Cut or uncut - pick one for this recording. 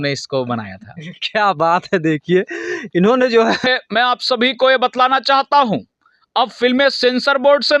cut